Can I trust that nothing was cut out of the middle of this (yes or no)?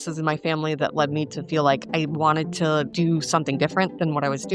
no